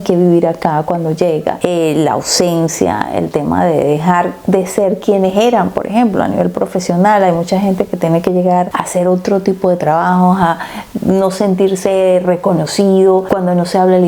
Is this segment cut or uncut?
uncut